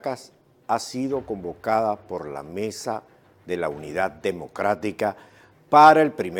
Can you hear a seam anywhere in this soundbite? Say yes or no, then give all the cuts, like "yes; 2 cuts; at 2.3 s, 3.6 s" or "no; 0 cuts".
yes; 1 cut; at 2.4 s